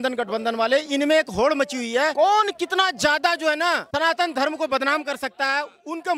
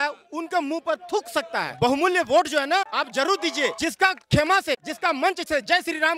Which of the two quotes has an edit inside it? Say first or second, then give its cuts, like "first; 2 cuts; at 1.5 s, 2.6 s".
second; 4 cuts; at 1.7 s, 2.9 s, 3.8 s, 4.9 s